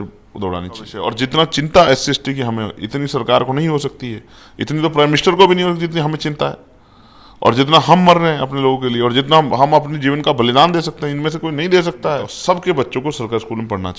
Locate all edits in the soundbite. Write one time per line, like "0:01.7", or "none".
0:01.0
0:12.3